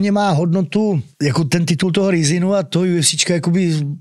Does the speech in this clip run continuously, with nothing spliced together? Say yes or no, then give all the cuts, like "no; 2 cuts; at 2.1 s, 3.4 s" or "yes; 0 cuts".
no; 1 cut; at 1.1 s